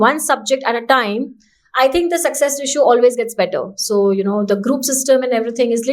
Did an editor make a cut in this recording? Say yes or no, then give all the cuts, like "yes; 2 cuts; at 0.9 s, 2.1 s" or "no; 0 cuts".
no; 0 cuts